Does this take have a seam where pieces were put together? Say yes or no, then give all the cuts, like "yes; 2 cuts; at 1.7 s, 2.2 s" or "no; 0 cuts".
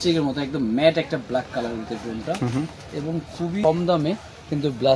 yes; 1 cut; at 3.6 s